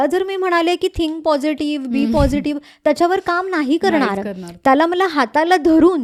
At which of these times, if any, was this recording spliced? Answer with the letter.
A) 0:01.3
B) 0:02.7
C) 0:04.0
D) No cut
D